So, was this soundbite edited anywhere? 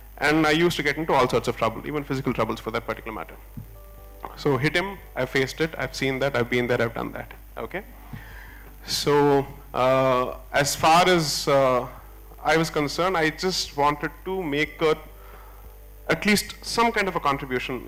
no; 0 cuts

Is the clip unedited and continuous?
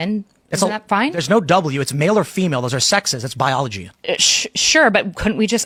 yes; 0 cuts

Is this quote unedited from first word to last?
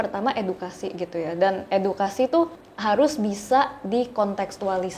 no; 1 cut; at 2.7 s

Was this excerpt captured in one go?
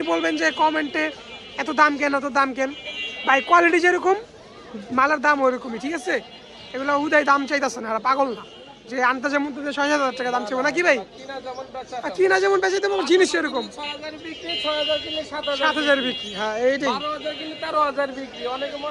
yes; 0 cuts

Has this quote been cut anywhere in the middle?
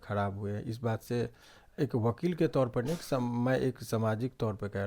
no; 0 cuts

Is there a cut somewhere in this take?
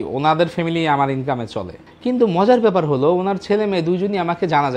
no; 0 cuts

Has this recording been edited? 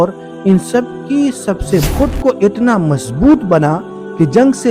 yes; 1 cut; at 1.9 s

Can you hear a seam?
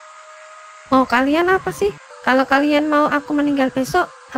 yes; 1 cut; at 2.1 s

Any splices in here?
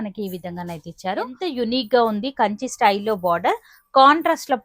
yes; 1 cut; at 1.4 s

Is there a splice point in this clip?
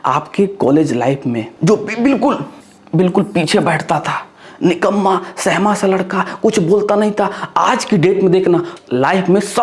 no; 0 cuts

